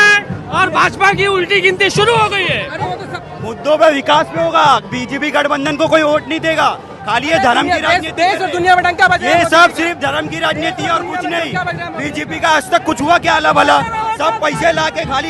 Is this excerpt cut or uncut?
cut